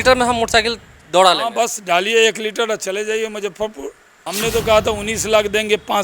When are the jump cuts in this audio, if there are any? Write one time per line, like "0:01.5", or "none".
0:04.3

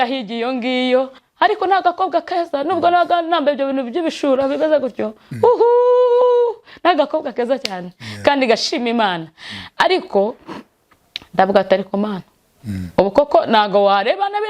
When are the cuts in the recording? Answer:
0:01.2

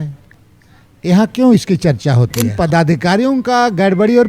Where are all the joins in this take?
0:02.3

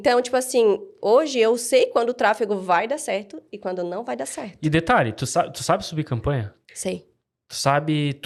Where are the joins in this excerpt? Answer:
none

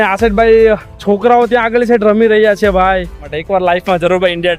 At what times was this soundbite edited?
0:03.3

